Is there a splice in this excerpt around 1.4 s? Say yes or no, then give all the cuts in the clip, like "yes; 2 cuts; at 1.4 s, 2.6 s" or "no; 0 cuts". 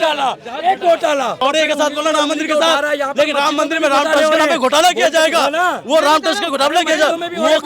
yes; 1 cut; at 1.4 s